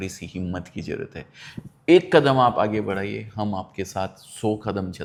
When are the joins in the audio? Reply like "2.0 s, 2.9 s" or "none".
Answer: none